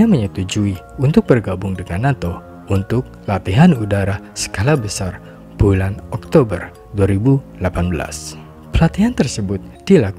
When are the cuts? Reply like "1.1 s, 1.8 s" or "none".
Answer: none